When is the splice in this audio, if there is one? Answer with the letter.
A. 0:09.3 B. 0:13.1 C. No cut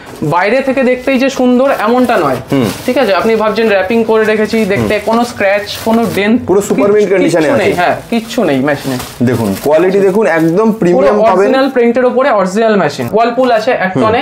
B